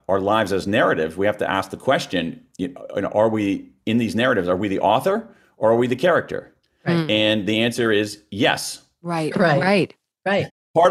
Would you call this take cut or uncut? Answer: uncut